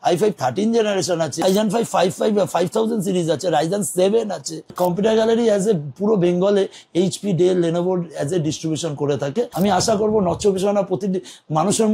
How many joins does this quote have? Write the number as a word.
three